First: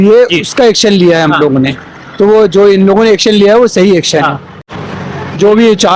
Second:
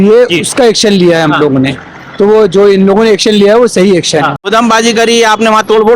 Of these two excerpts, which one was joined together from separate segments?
second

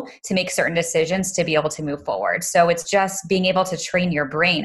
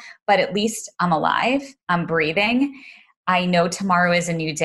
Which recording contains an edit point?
first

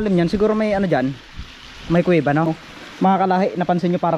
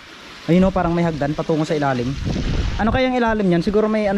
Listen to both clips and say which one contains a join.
first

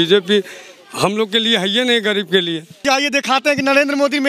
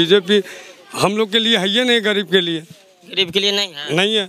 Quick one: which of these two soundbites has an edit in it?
first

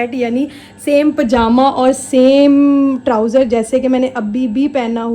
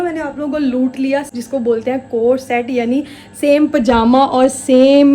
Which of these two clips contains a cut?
second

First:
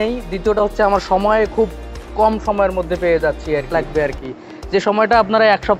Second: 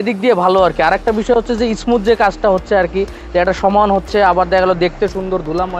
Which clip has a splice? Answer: first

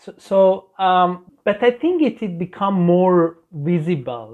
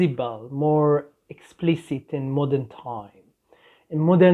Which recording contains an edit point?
first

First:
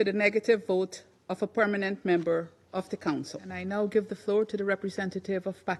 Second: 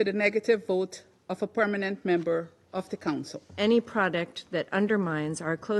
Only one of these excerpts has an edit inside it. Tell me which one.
second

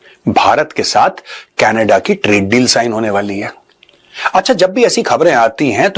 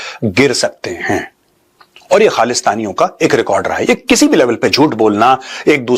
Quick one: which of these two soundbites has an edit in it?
first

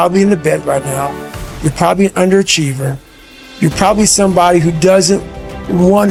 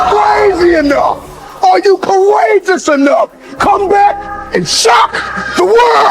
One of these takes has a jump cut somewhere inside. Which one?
second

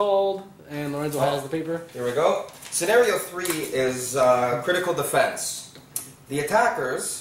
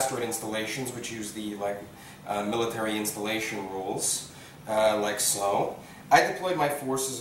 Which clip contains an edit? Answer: second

